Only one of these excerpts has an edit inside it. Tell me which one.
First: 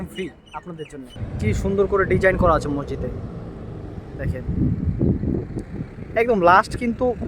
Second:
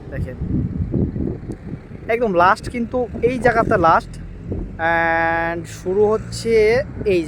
first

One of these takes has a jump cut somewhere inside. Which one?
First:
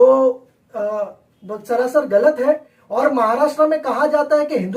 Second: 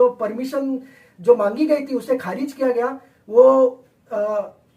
first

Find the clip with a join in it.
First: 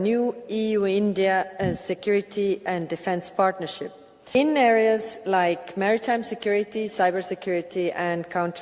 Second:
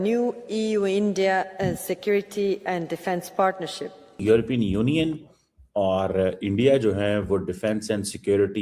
second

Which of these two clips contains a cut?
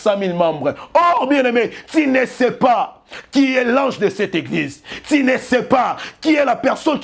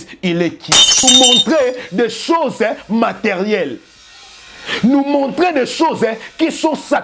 second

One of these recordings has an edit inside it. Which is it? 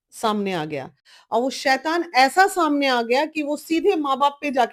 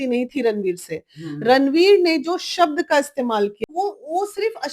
second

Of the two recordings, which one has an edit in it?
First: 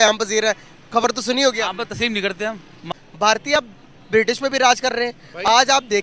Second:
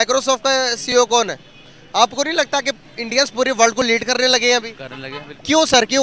first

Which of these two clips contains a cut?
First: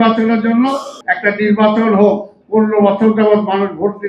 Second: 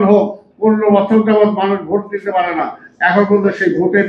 first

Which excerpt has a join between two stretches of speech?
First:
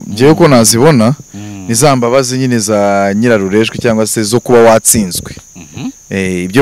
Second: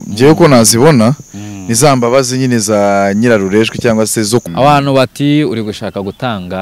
second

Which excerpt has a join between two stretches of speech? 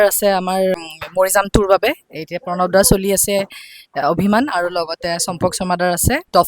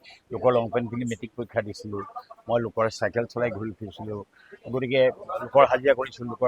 first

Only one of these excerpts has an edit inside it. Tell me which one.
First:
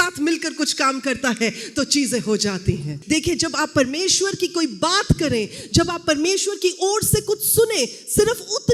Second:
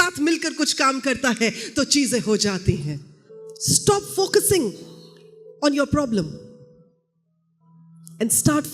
first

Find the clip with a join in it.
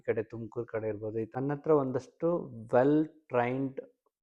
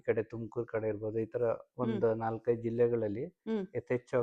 first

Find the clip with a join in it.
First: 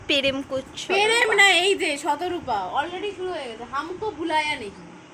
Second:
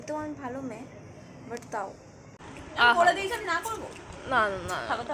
second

